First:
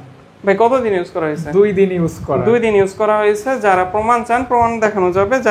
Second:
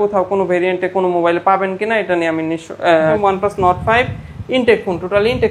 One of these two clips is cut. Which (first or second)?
second